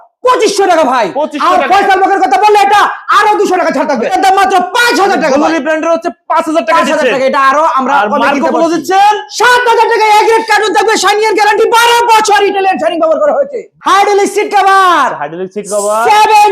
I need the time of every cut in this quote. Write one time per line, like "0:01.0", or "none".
0:04.1
0:13.6